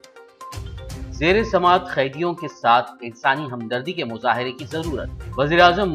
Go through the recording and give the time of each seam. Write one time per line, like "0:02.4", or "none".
none